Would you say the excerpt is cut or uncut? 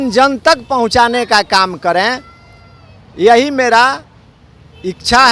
uncut